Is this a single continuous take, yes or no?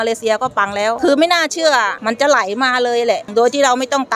no